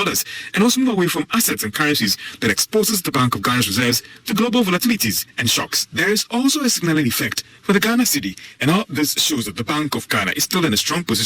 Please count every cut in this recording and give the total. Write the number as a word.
zero